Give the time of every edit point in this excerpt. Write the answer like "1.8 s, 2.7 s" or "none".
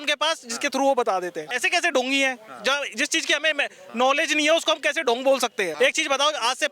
1.5 s, 5.7 s